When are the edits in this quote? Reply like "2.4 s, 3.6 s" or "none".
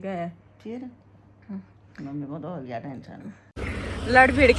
3.6 s